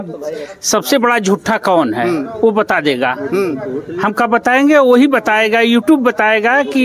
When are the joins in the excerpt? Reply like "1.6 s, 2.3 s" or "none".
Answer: none